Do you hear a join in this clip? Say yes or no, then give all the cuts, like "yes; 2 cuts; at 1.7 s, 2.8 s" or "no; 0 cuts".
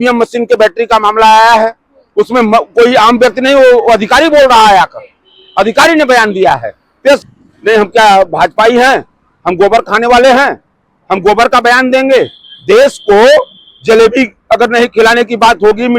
yes; 1 cut; at 7.2 s